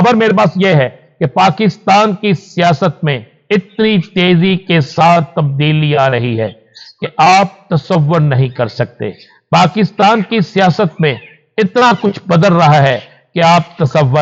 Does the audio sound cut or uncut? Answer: uncut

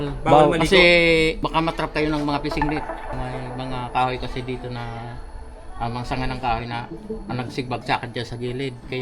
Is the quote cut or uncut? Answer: cut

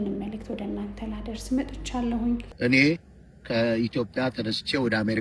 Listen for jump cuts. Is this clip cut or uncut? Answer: cut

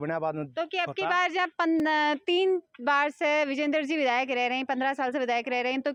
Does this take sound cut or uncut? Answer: uncut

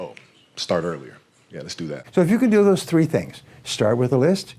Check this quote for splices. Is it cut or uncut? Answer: cut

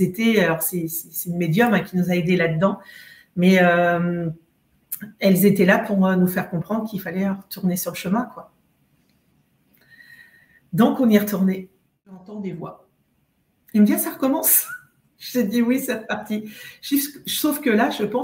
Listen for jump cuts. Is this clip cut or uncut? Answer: cut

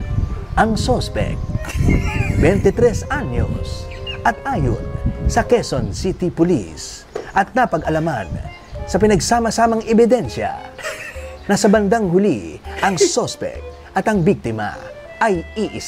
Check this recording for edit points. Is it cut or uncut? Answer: uncut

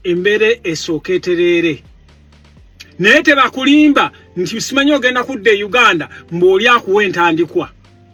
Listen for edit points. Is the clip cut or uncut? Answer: uncut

